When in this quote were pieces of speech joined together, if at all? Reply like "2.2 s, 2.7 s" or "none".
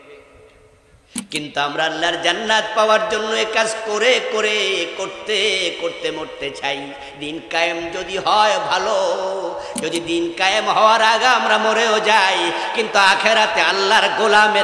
none